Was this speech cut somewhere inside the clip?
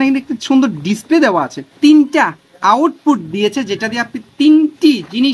yes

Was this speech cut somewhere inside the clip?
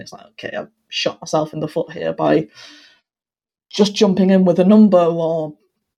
no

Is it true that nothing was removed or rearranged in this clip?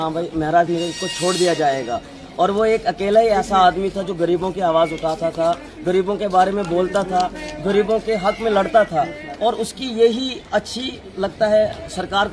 yes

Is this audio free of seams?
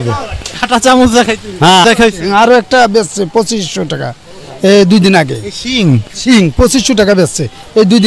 no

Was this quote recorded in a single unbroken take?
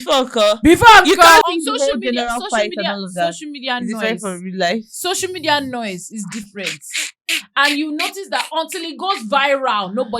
no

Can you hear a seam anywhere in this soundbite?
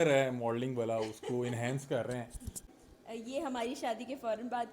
yes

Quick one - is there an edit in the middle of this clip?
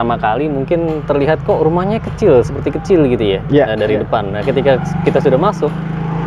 no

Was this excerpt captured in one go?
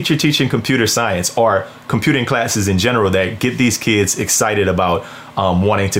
yes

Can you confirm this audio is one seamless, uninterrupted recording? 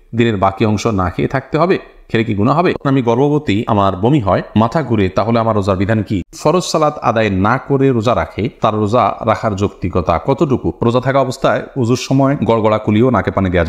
no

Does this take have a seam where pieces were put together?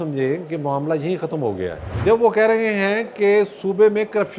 yes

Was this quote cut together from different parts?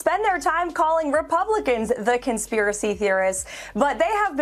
no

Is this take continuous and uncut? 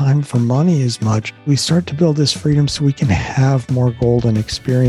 no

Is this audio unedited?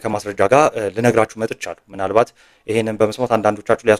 yes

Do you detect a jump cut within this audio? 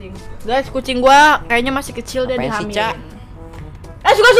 no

